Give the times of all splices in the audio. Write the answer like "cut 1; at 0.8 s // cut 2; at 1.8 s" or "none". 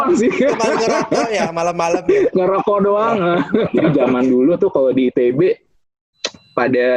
cut 1; at 3.7 s